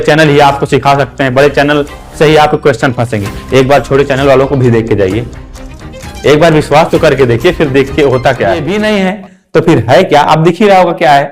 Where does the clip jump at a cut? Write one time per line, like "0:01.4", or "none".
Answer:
0:08.7

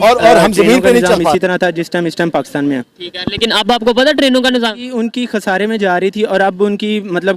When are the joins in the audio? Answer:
0:01.3

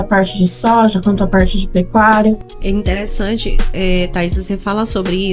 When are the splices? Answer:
0:02.5

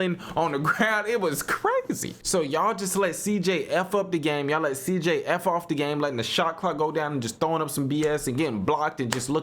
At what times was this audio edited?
0:02.1

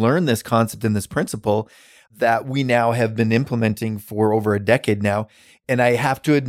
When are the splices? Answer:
0:05.5

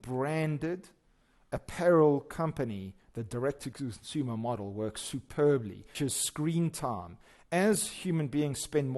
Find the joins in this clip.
0:05.9

